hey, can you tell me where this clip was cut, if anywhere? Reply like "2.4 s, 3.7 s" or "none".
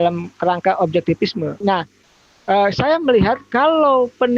1.6 s